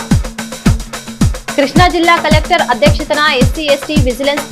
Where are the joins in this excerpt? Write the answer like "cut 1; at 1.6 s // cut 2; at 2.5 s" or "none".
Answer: cut 1; at 1.5 s